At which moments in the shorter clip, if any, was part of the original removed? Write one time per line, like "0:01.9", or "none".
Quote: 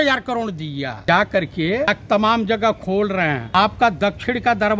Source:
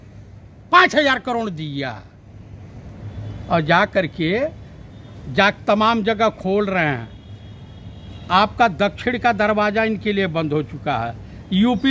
0:01.0
0:01.9
0:03.4